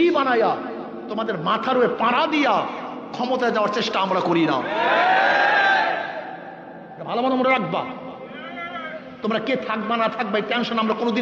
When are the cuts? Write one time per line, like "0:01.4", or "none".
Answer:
none